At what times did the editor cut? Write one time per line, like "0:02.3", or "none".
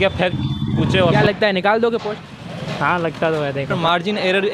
0:01.2
0:03.8